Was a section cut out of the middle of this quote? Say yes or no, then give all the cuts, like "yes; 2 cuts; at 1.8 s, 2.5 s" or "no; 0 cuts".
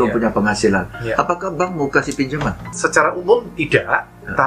yes; 1 cut; at 2.7 s